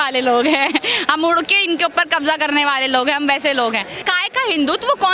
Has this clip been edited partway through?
yes; 1 cut; at 4.0 s

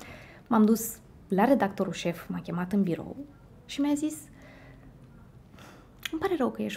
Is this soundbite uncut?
yes; 0 cuts

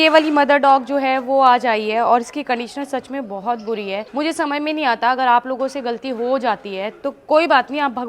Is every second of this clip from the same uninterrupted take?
yes; 0 cuts

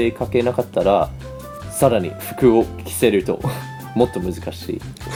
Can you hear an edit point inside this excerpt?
no; 0 cuts

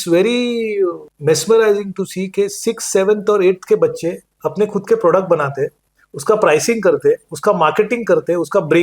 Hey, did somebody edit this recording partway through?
yes; 1 cut; at 1.1 s

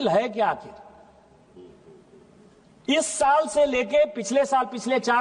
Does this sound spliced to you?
no; 0 cuts

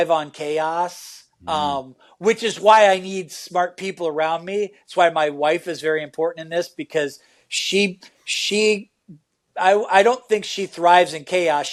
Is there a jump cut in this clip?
no; 0 cuts

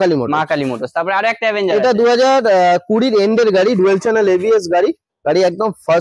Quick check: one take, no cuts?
yes; 0 cuts

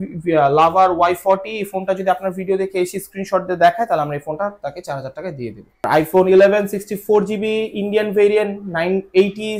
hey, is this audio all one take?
no; 1 cut; at 5.8 s

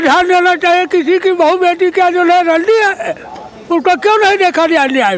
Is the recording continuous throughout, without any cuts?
yes; 0 cuts

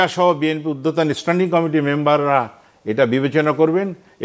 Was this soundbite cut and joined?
no; 0 cuts

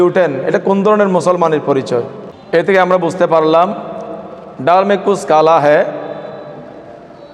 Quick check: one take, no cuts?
yes; 0 cuts

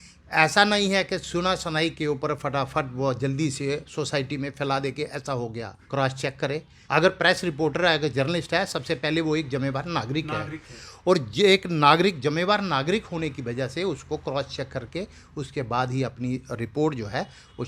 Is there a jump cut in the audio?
yes; 2 cuts; at 5.8 s, 6.7 s

